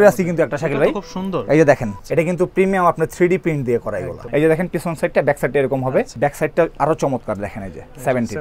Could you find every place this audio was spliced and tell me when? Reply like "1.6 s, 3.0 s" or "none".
2.0 s, 4.1 s, 6.1 s